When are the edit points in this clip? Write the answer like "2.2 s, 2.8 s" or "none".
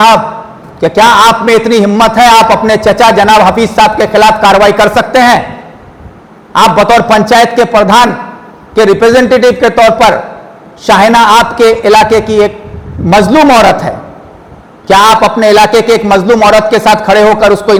none